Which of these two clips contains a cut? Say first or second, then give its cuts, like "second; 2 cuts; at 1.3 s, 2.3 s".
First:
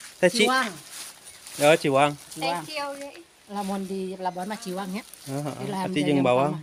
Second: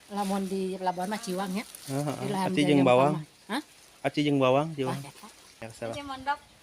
second; 1 cut; at 5.7 s